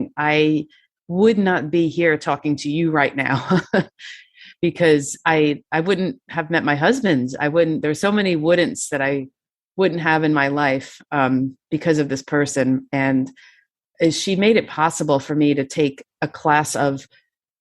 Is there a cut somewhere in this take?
no; 0 cuts

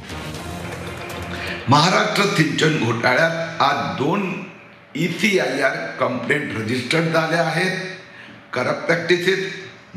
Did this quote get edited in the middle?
yes; 1 cut; at 1.6 s

